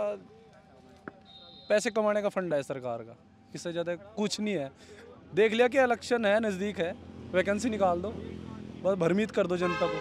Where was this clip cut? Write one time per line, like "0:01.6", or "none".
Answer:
none